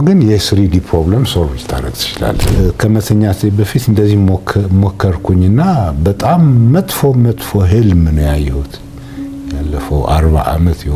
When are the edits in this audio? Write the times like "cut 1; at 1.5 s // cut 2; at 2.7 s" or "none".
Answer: cut 1; at 2.4 s